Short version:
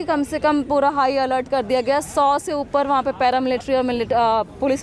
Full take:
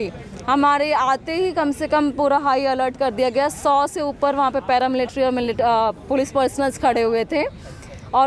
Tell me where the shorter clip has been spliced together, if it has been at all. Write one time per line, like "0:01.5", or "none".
none